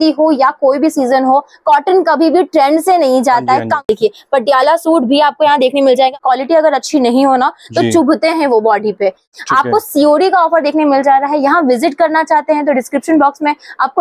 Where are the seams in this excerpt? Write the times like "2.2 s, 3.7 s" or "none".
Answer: 3.9 s, 6.1 s, 9.3 s